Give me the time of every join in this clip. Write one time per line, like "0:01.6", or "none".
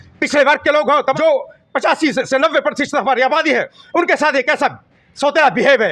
0:01.2